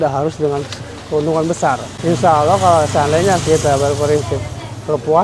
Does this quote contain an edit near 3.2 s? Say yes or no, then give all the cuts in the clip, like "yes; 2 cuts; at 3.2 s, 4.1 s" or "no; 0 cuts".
no; 1 cut; at 1.9 s